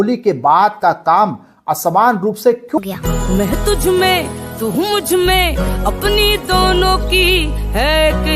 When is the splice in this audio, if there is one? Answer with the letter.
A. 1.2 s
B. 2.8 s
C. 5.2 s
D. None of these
B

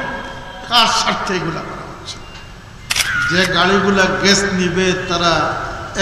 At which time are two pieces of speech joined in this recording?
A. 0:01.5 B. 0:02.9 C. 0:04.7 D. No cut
B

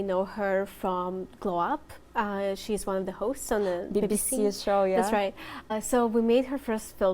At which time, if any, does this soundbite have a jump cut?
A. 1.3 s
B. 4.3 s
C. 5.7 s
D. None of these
C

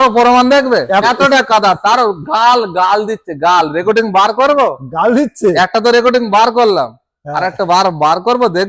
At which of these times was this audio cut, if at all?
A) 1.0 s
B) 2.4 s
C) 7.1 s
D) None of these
A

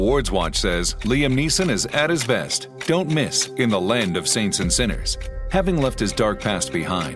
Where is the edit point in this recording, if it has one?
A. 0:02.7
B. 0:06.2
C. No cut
C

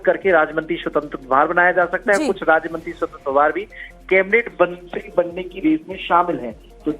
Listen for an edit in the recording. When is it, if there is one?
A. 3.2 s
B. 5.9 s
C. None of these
B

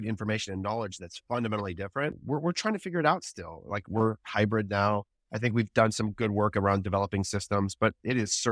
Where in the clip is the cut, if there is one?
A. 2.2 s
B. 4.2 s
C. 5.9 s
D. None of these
A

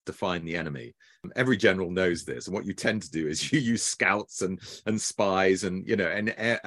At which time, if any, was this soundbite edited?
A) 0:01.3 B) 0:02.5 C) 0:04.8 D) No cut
A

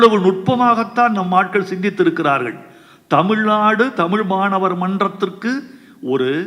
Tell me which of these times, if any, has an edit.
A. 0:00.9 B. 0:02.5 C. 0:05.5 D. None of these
D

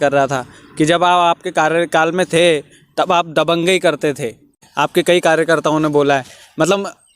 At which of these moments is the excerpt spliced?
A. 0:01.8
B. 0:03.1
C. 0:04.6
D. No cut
C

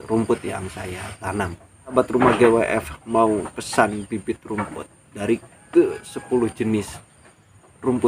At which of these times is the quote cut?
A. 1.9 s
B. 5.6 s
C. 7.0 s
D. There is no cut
A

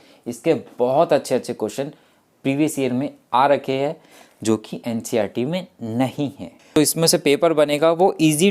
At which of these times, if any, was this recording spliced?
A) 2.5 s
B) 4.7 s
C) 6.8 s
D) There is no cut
C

